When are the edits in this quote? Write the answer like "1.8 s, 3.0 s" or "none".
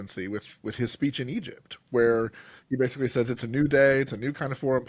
none